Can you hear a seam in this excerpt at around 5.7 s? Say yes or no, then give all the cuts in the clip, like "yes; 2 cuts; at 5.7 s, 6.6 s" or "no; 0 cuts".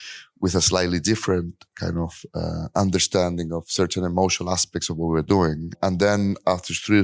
yes; 1 cut; at 5.7 s